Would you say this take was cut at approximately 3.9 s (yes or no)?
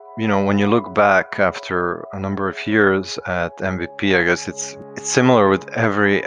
no